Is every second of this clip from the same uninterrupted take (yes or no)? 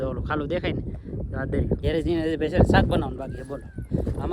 no